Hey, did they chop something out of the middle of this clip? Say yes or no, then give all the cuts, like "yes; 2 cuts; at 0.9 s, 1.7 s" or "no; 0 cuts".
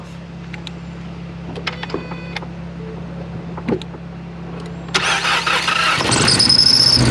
no; 0 cuts